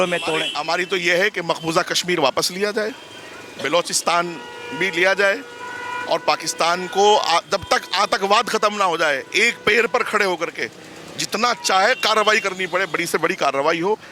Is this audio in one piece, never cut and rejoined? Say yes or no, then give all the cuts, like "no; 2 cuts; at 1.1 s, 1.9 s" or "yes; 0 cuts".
yes; 0 cuts